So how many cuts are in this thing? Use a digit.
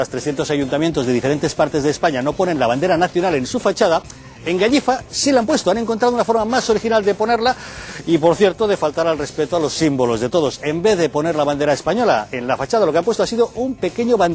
1